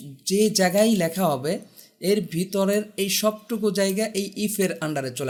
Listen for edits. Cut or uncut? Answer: uncut